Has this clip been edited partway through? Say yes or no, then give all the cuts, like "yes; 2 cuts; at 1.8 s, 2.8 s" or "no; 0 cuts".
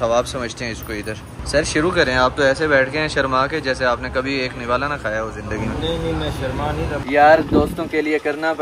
yes; 2 cuts; at 1.3 s, 7.0 s